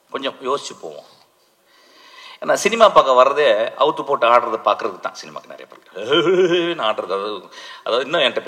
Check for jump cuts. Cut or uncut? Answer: uncut